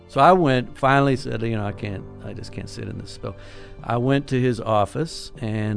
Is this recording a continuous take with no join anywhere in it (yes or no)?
no